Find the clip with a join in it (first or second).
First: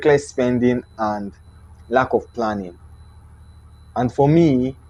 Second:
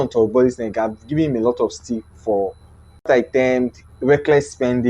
second